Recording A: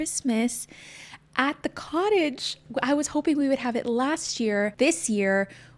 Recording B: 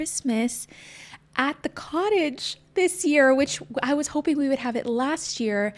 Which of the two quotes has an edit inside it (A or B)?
A